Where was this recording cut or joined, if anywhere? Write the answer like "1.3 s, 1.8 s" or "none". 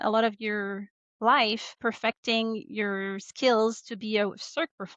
1.8 s

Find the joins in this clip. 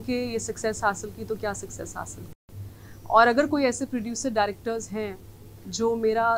none

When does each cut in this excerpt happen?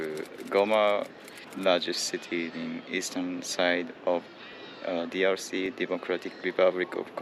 none

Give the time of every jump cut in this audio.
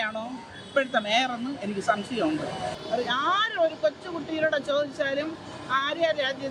2.7 s

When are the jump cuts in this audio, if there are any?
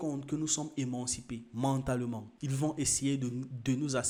none

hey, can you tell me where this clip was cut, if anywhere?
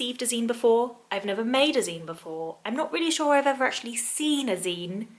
none

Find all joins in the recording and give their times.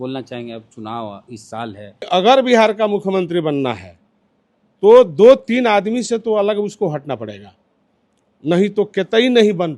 2.1 s

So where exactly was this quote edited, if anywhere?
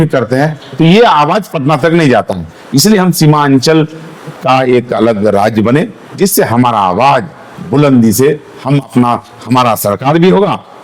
none

